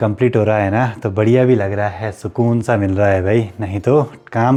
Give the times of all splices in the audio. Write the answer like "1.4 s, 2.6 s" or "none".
none

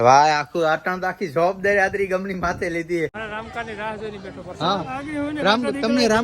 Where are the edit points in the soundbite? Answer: 3.2 s

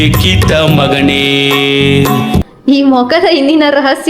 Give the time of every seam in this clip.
2.4 s

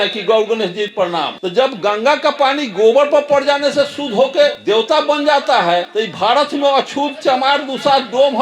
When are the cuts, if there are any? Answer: 1.1 s, 4.6 s, 5.9 s

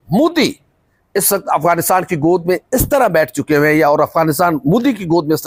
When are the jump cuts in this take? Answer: none

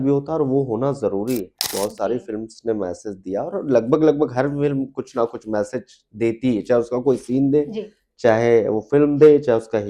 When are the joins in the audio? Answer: 1.7 s

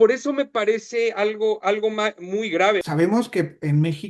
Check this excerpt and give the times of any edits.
2.8 s

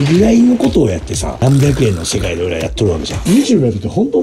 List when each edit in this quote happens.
1.4 s, 3.2 s

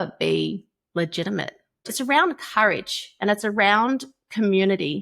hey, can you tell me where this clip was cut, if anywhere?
1.9 s

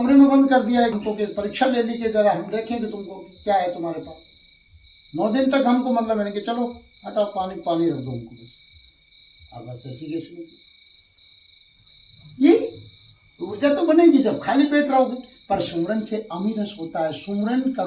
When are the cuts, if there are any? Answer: 1.0 s

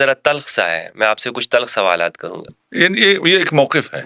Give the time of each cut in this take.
2.6 s

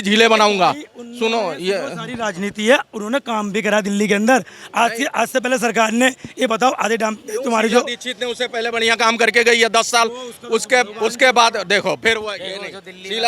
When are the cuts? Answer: none

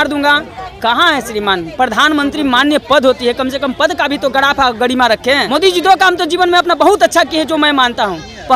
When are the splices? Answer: none

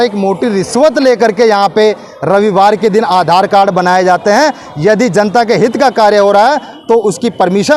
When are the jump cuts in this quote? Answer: none

